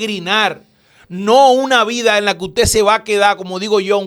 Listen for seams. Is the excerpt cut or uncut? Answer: uncut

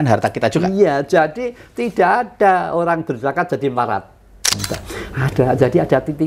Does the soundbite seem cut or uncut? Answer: cut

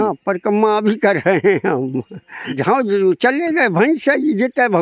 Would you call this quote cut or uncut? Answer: cut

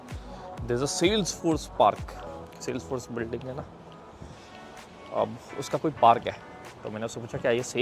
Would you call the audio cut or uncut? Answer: uncut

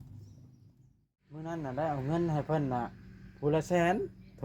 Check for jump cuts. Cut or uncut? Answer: cut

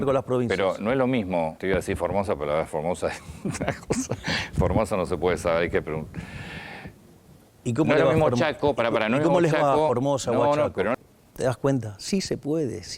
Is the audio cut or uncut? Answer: cut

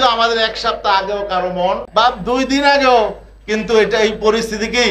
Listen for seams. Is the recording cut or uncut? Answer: cut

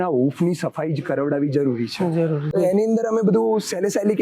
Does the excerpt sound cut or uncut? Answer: cut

